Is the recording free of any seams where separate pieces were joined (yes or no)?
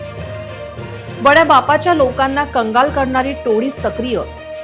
yes